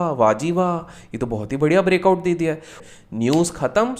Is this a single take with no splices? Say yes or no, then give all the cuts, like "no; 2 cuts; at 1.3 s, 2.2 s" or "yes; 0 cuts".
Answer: no; 1 cut; at 2.7 s